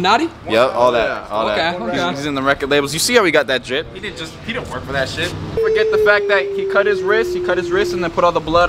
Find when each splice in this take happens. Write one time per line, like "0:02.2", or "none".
0:05.6